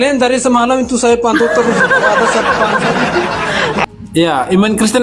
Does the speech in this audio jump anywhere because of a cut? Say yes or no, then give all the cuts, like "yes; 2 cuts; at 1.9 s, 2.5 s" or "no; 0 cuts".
yes; 1 cut; at 3.8 s